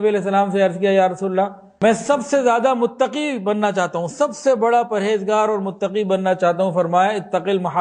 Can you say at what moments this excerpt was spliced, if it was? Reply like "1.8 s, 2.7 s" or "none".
1.6 s